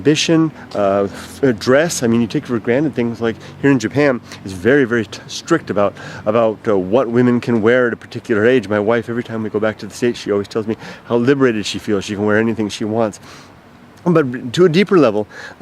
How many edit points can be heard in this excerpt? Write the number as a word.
one